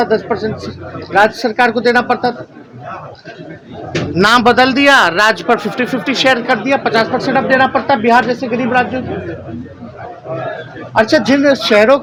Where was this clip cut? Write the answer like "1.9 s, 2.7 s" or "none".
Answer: none

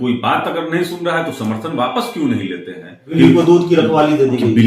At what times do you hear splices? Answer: 3.1 s

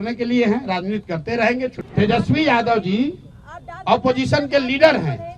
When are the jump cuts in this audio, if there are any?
1.8 s

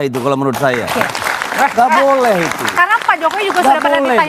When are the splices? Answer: none

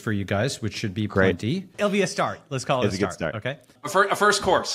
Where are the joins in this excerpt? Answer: 1.8 s, 3.8 s

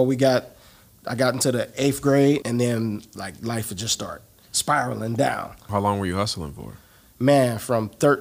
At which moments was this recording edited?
2.4 s, 5.7 s

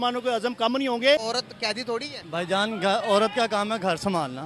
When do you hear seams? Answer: 1.2 s

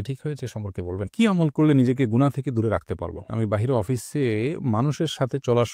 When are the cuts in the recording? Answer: 1.1 s, 3.3 s

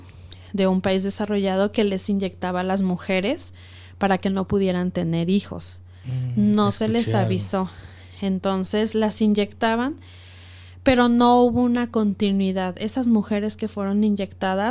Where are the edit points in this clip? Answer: none

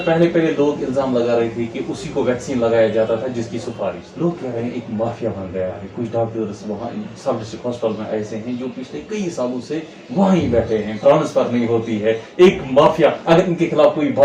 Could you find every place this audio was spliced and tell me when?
4.0 s

